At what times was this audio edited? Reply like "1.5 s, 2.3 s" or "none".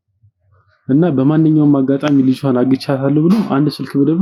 none